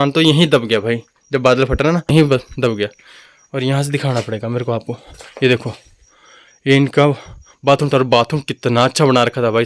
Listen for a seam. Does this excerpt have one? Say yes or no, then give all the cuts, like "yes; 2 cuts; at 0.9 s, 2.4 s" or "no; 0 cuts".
no; 0 cuts